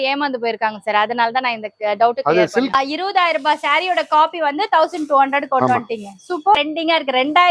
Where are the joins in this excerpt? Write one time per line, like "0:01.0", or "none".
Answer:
0:02.7
0:06.6